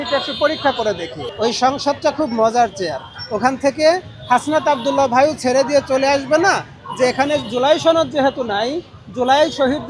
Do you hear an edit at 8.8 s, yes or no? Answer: no